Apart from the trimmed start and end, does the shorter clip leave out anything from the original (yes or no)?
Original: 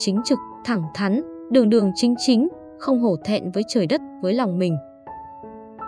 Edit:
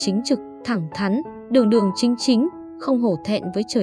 no